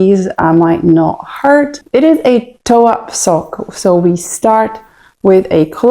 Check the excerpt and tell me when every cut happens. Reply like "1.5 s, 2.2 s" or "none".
1.8 s

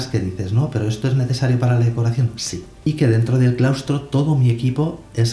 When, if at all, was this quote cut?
2.9 s

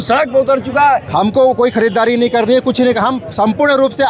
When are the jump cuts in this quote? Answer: 1.1 s

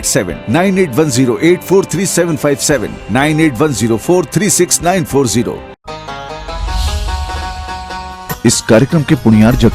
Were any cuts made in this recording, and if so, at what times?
5.7 s

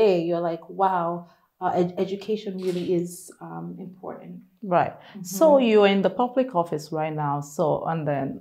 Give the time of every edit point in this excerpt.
none

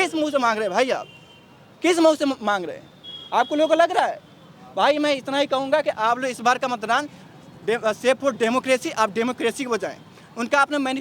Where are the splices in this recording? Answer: none

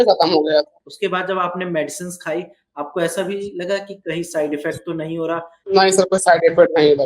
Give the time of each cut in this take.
0.9 s, 5.5 s

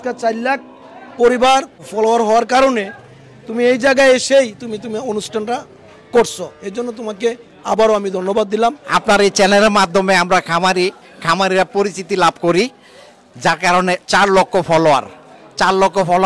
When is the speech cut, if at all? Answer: 1.8 s, 8.9 s

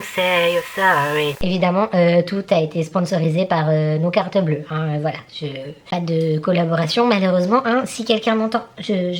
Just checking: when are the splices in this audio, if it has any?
1.4 s

